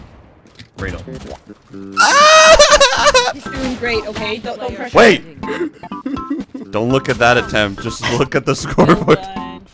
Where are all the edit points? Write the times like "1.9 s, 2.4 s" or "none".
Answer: none